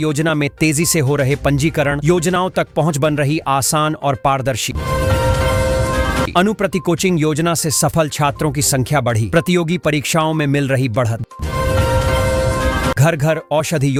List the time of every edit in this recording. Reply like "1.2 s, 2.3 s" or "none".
none